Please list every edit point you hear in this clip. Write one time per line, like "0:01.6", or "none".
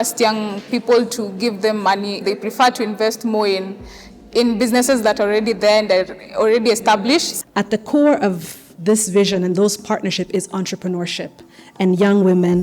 0:02.2
0:07.3